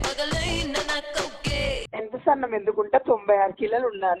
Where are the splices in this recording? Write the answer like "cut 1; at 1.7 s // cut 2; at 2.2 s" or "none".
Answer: cut 1; at 1.8 s

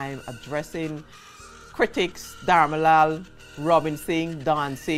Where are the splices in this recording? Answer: none

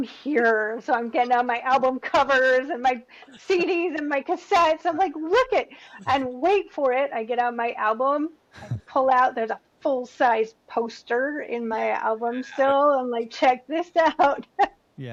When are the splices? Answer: none

